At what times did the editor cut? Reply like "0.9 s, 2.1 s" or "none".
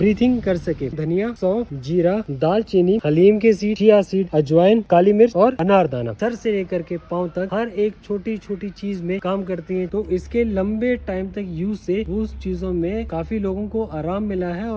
0.9 s, 4.9 s, 6.2 s, 9.9 s, 13.1 s